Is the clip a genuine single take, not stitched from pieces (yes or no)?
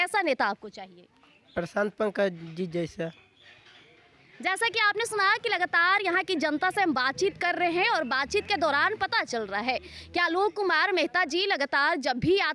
yes